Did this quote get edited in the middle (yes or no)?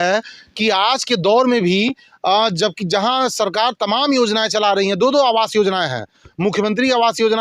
no